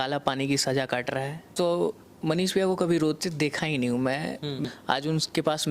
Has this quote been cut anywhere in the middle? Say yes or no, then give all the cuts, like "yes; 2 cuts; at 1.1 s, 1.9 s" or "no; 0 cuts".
yes; 2 cuts; at 1.5 s, 4.6 s